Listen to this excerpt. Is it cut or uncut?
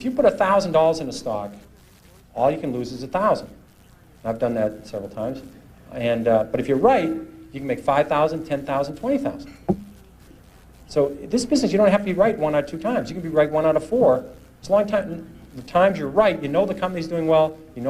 uncut